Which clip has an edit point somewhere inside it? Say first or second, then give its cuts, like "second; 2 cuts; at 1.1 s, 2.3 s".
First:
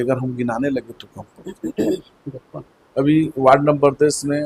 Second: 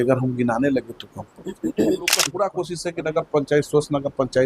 second; 1 cut; at 2.2 s